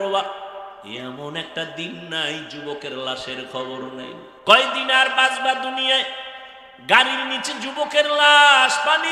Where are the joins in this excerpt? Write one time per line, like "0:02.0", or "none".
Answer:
0:04.3